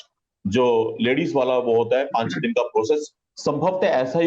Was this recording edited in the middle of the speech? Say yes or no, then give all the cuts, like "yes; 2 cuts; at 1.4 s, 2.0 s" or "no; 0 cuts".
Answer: yes; 1 cut; at 3.2 s